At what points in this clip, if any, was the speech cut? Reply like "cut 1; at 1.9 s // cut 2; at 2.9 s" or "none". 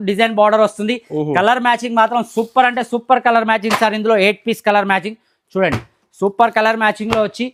none